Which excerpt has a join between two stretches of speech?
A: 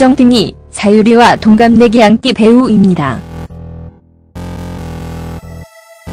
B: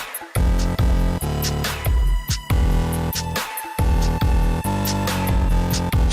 B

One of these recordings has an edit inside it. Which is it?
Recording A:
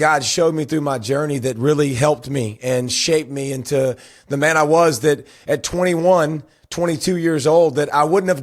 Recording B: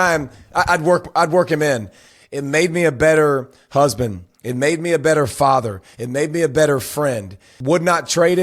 B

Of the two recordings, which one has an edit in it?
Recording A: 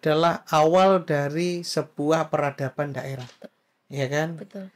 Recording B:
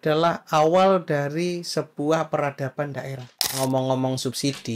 B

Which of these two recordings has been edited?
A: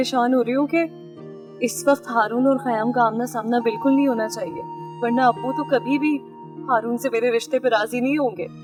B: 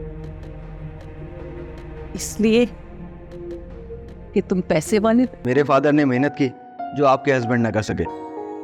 B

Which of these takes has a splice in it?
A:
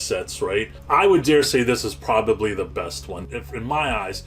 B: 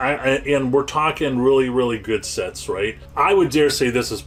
A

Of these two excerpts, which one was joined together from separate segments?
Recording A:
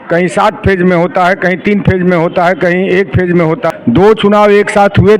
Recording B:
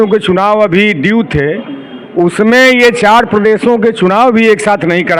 A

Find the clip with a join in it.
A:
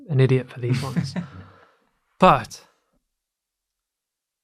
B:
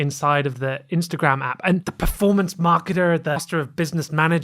B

